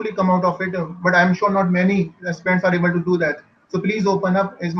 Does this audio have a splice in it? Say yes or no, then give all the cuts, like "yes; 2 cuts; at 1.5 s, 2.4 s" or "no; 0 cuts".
no; 0 cuts